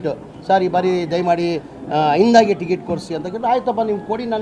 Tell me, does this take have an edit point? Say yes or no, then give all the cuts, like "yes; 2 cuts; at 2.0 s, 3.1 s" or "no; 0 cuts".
no; 0 cuts